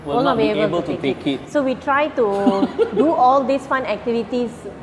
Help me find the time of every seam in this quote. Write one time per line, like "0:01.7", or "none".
none